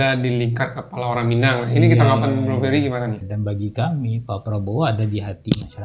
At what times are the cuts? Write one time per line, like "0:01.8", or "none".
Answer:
0:03.3